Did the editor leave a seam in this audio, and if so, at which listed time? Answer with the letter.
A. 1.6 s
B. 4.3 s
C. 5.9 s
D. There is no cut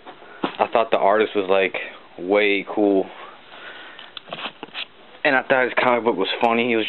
A